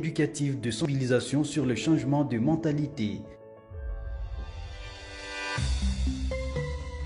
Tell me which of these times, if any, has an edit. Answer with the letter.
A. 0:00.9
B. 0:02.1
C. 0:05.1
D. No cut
A